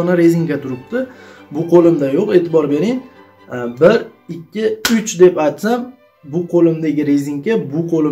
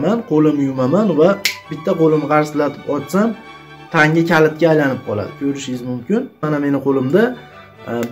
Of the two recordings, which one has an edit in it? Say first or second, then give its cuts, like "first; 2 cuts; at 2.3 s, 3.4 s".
second; 1 cut; at 6.4 s